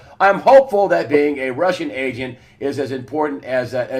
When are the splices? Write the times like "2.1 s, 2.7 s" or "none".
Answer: 2.5 s